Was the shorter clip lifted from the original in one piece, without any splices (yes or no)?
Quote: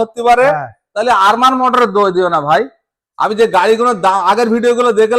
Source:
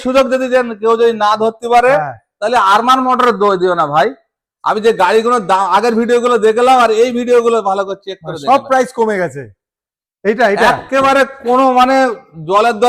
yes